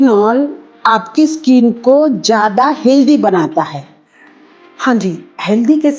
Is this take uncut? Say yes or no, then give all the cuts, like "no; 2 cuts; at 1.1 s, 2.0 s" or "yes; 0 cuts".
yes; 0 cuts